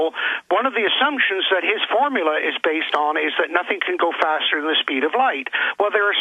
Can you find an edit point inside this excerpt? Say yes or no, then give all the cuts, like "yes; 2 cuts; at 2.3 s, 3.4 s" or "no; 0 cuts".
yes; 1 cut; at 3.6 s